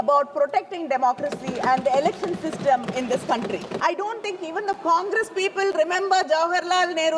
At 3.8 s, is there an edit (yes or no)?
yes